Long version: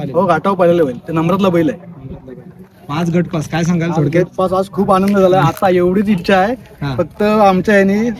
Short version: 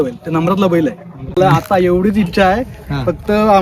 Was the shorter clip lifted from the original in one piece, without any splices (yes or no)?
no